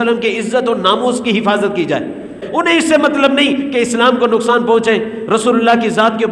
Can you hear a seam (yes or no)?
yes